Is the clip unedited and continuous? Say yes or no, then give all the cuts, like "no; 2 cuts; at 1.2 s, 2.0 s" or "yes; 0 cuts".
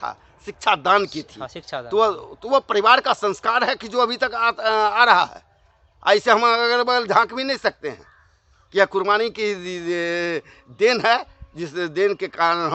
yes; 0 cuts